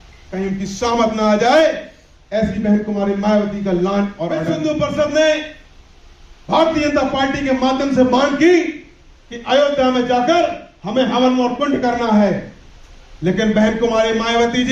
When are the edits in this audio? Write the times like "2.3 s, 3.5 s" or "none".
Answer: 4.4 s